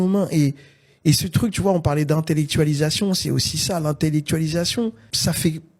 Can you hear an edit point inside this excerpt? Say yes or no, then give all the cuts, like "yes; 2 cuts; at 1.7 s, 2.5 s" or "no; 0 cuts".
no; 0 cuts